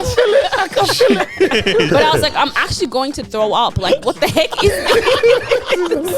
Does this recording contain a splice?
yes; 1 cut; at 1.9 s

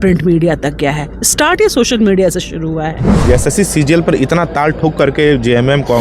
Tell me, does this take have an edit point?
yes; 1 cut; at 3.1 s

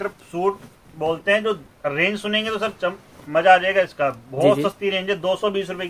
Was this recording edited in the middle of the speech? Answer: no; 0 cuts

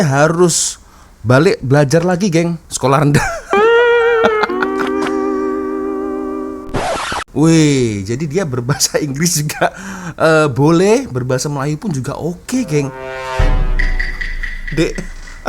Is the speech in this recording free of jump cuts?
no; 1 cut; at 7.1 s

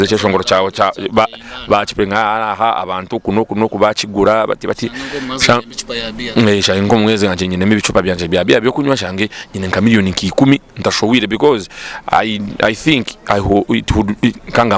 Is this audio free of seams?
yes; 0 cuts

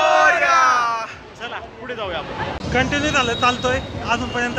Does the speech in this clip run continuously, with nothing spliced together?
yes; 0 cuts

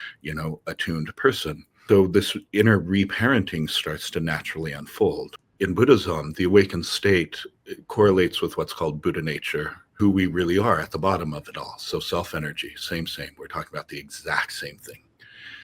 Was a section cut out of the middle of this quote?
yes; 3 cuts; at 1.8 s, 5.4 s, 9.8 s

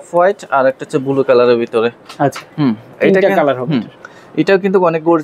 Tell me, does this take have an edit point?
no; 0 cuts

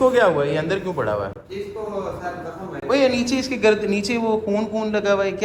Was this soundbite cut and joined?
no; 0 cuts

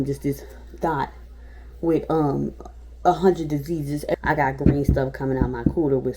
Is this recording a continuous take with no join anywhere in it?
no; 1 cut; at 4.1 s

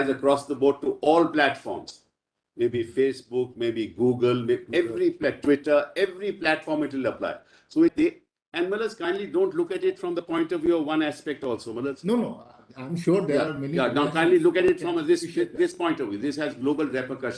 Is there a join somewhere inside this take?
yes; 1 cut; at 7.9 s

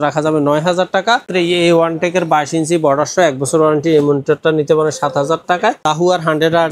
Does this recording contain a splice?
yes; 2 cuts; at 1.3 s, 5.8 s

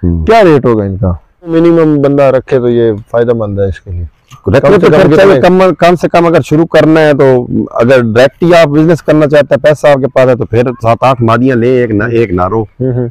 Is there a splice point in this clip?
yes; 1 cut; at 1.5 s

